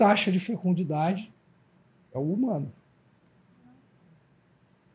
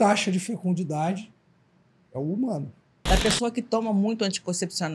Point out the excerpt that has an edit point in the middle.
second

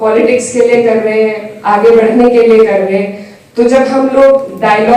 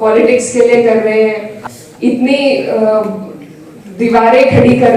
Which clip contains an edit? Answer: second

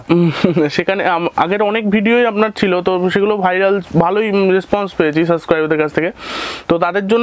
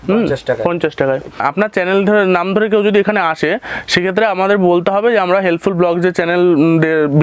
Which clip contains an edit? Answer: second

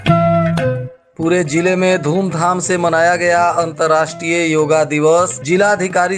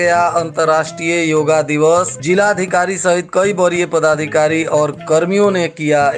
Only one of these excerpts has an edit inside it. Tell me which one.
first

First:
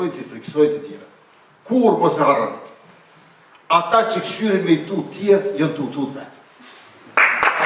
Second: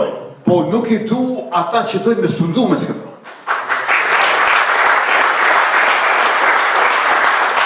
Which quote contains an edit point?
second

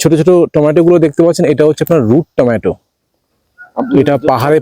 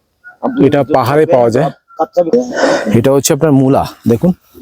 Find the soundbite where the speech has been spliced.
second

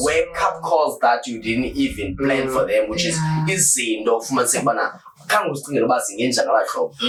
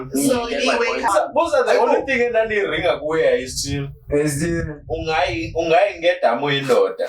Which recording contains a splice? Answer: second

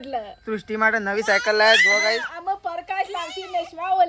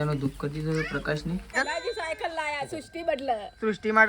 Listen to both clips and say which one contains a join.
second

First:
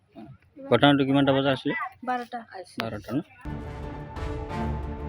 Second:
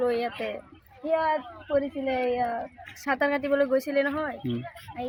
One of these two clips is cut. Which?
first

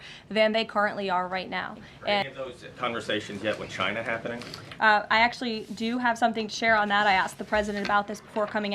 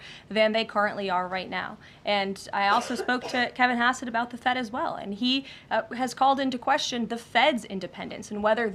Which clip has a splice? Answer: first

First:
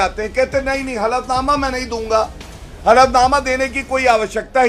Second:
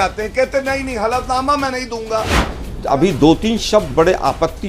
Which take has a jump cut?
second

